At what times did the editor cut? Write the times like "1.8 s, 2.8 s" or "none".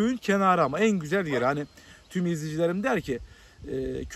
none